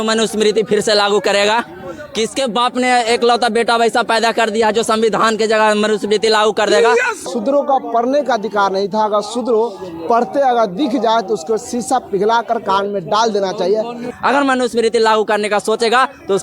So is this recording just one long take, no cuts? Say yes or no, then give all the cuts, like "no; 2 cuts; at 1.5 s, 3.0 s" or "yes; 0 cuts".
no; 2 cuts; at 7.2 s, 14.1 s